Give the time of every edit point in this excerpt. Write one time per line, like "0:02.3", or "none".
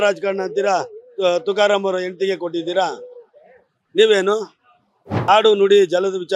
0:05.2